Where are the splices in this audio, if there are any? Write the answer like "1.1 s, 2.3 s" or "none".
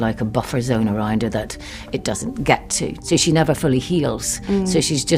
3.0 s